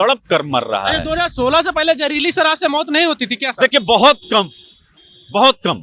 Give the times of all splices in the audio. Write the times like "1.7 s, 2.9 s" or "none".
none

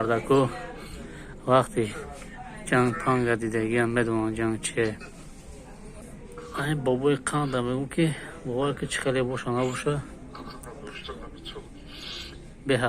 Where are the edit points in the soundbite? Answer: 5.9 s

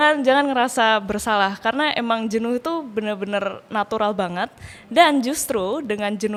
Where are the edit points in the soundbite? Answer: none

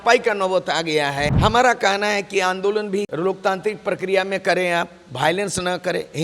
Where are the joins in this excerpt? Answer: 1.3 s, 3.1 s

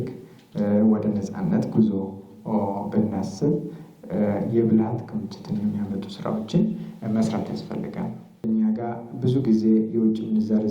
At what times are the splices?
8.2 s

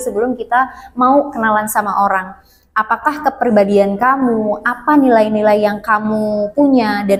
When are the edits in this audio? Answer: none

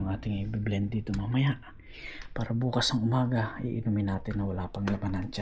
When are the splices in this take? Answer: none

